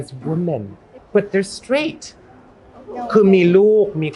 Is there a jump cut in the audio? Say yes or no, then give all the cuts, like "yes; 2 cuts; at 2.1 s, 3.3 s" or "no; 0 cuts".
yes; 1 cut; at 1.0 s